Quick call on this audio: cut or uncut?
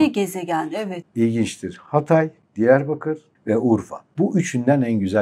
cut